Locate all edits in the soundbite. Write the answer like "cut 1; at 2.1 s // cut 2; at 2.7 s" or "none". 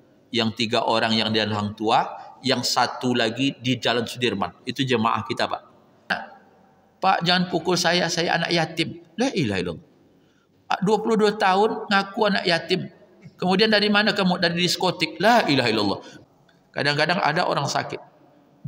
cut 1; at 6.2 s // cut 2; at 16.1 s